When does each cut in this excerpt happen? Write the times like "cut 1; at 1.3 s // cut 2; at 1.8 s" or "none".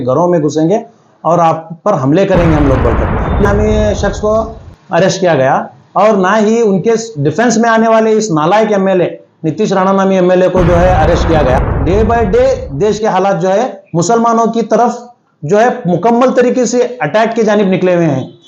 cut 1; at 3.5 s // cut 2; at 11.7 s